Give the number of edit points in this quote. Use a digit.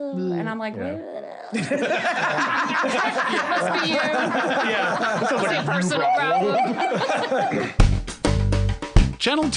1